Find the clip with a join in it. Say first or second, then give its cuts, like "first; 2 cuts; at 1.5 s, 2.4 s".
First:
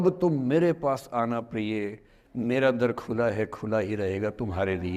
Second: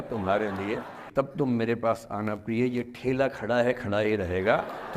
second; 1 cut; at 1.0 s